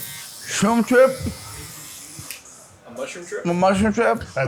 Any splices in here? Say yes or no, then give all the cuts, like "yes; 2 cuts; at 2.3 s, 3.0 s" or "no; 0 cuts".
no; 0 cuts